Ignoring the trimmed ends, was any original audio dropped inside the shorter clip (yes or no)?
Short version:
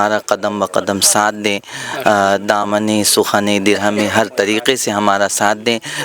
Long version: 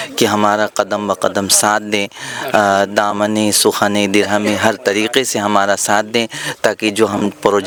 no